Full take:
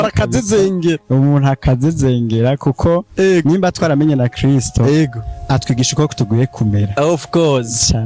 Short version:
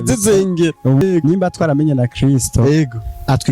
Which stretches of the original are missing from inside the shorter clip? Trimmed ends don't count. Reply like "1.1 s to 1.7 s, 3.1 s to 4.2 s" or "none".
1.3 s to 3.2 s